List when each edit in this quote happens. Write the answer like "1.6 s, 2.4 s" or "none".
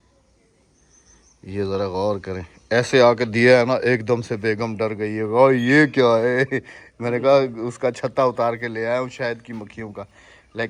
none